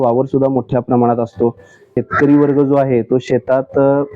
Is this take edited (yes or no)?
yes